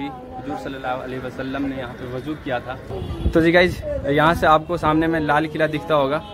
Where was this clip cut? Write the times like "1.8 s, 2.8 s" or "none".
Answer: 2.9 s